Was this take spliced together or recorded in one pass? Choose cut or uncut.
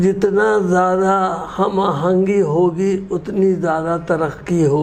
uncut